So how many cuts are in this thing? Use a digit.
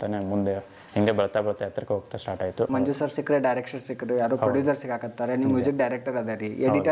1